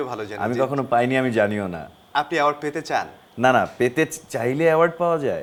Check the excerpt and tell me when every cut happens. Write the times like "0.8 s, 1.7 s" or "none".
none